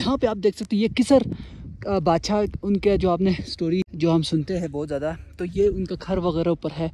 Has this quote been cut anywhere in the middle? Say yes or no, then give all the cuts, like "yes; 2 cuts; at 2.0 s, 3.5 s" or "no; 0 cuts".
yes; 1 cut; at 3.9 s